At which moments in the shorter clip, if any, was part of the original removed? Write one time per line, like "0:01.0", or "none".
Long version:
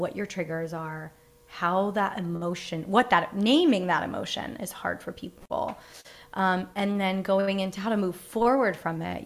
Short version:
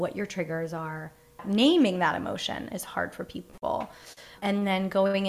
0:01.4
0:04.4